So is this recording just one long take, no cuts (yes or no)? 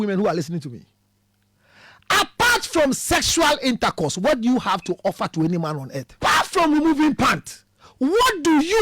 no